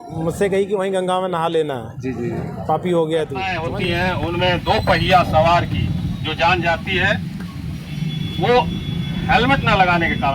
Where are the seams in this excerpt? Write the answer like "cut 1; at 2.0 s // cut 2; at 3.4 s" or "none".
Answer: cut 1; at 3.6 s

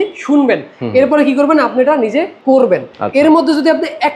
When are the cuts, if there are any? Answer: cut 1; at 2.3 s

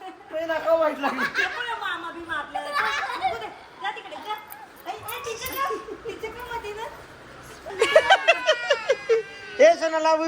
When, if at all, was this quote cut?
cut 1; at 7.7 s

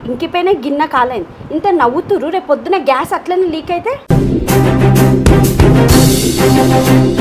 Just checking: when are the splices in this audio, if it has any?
none

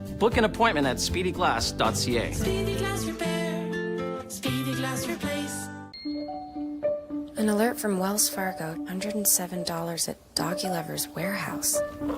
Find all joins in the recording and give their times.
cut 1; at 5.8 s

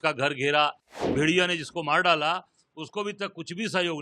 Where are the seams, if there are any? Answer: cut 1; at 1.1 s

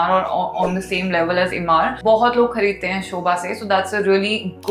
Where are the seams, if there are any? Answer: cut 1; at 2.0 s

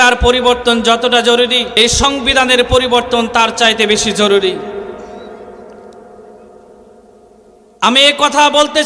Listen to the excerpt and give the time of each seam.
cut 1; at 1.7 s

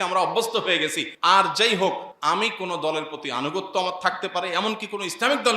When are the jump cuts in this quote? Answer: cut 1; at 1.1 s // cut 2; at 2.1 s

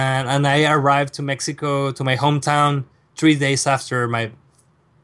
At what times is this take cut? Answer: none

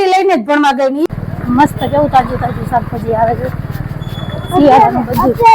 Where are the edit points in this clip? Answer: cut 1; at 1.1 s

